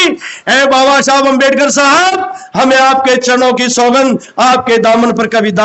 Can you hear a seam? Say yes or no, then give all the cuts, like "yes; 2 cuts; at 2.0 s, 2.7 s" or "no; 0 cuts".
no; 0 cuts